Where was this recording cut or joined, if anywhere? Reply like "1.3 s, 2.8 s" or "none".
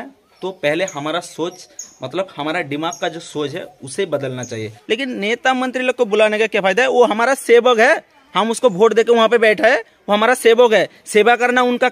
5.1 s